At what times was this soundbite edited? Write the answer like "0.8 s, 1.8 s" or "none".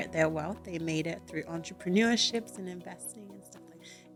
none